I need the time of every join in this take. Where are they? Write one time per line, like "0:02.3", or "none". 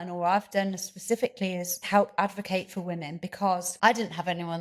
0:01.8
0:03.7